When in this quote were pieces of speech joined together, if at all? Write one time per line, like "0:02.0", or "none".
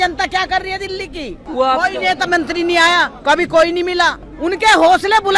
0:01.4
0:04.3

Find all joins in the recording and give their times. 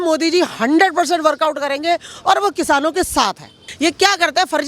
0:03.6

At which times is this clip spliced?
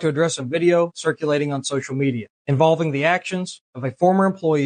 0:02.3

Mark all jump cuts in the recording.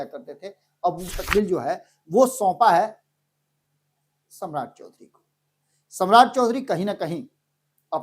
0:01.1

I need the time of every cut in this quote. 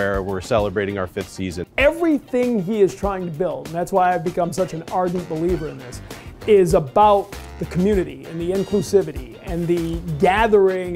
0:01.6

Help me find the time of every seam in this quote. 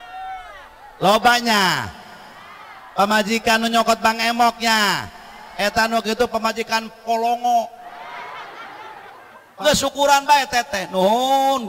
0:09.4

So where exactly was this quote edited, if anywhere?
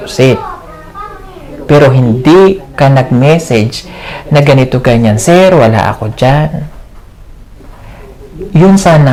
none

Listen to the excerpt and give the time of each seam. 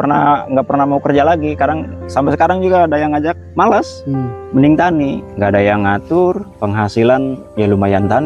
none

